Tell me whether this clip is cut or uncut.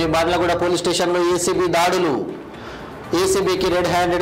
uncut